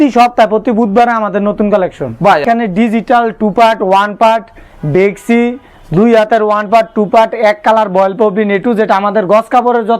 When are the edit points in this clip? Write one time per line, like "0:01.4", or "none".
0:02.4